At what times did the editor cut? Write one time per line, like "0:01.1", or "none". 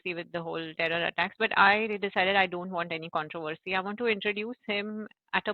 none